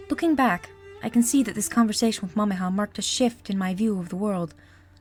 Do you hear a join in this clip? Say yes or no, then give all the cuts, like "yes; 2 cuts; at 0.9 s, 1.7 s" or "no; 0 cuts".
no; 0 cuts